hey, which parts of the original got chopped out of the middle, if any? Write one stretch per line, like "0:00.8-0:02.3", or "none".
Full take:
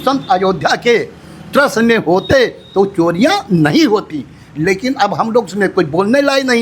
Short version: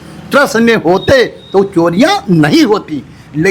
none